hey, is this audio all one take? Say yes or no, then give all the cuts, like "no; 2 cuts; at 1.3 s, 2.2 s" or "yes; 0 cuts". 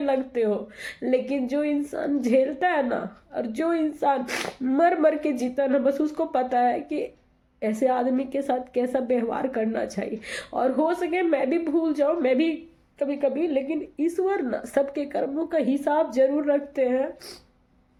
yes; 0 cuts